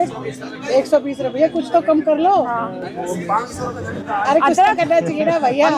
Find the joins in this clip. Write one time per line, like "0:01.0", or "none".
none